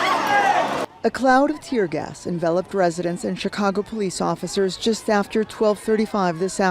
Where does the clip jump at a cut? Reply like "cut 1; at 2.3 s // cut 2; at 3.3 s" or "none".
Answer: none